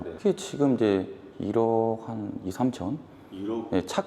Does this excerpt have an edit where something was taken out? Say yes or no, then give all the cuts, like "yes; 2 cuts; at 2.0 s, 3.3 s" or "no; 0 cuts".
no; 0 cuts